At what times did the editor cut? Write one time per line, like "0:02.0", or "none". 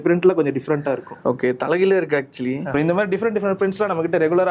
0:02.7